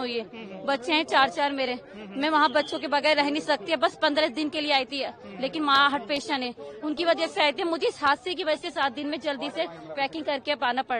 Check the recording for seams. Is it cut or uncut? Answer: uncut